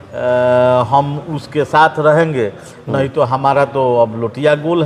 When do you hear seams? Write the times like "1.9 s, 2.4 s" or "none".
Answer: none